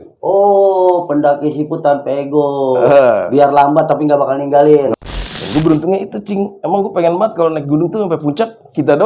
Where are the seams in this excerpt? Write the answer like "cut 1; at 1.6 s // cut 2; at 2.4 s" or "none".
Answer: cut 1; at 4.9 s